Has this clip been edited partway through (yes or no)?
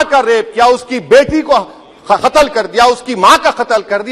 no